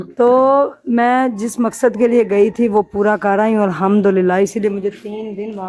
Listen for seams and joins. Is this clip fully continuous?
yes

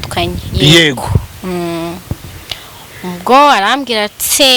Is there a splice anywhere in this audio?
no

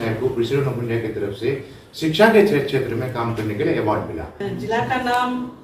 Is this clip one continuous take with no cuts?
no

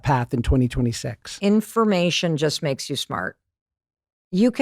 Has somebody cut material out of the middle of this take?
yes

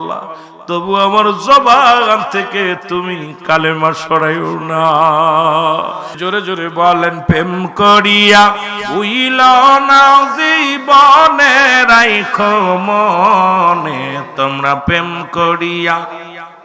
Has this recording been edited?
yes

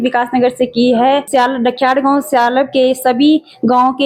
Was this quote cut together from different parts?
yes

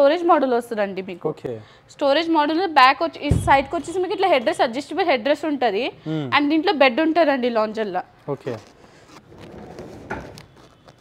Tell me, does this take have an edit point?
no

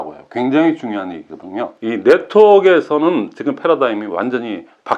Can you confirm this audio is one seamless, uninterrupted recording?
no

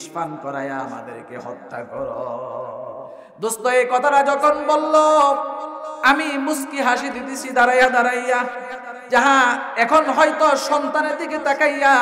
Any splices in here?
yes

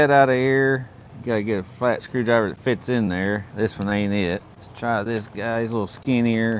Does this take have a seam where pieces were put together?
no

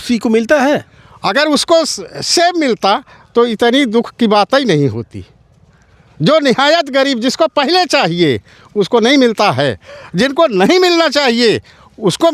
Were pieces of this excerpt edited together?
no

